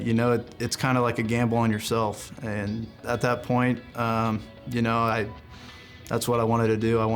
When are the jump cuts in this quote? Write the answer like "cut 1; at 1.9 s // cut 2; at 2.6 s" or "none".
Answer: cut 1; at 3.0 s